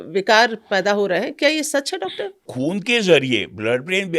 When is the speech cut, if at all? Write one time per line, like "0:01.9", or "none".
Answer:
0:02.5